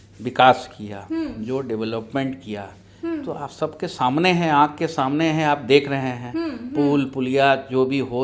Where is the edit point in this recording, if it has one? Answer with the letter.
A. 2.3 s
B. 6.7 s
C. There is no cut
C